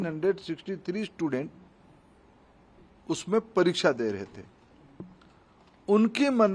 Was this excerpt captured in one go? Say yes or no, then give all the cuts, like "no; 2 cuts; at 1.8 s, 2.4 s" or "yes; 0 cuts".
yes; 0 cuts